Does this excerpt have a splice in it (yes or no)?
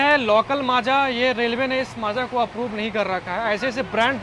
no